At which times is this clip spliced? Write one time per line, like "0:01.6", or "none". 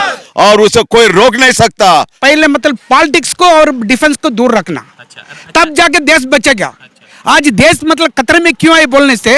0:02.2